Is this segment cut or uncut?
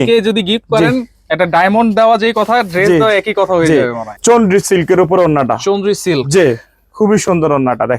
cut